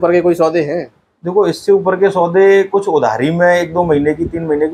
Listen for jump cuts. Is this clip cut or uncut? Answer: uncut